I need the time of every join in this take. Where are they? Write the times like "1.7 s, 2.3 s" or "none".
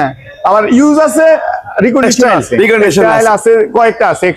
3.0 s